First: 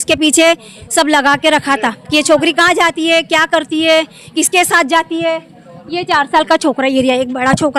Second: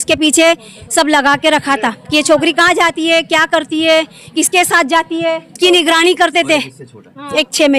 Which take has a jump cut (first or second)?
second